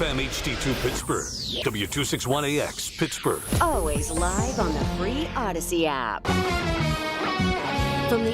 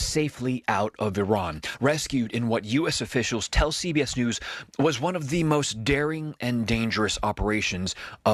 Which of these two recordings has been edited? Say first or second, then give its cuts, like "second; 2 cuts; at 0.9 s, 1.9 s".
first; 1 cut; at 6.2 s